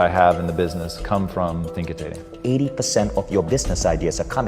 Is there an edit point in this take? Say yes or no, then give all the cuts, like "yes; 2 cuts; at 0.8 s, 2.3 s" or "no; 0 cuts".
yes; 1 cut; at 2.3 s